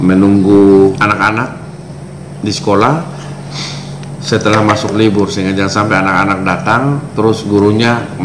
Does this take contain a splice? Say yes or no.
yes